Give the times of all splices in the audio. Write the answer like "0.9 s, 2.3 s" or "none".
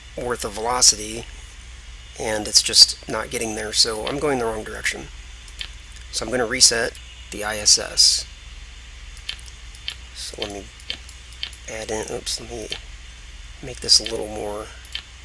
none